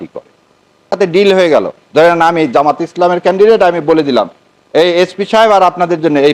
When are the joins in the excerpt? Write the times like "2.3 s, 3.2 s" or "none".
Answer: 0.9 s